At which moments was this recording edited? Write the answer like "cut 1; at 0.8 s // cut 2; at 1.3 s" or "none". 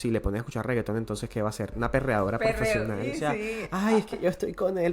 cut 1; at 1.7 s // cut 2; at 3.1 s